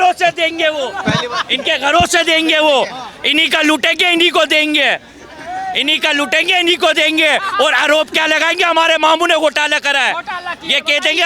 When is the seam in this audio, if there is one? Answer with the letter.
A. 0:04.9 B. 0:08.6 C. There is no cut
C